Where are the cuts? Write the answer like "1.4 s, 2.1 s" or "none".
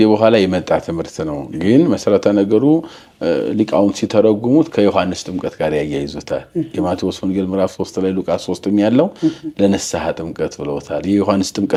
none